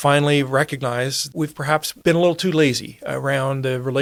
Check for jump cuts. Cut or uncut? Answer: uncut